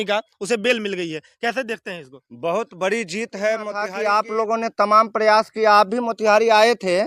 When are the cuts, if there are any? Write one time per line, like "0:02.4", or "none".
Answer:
0:03.8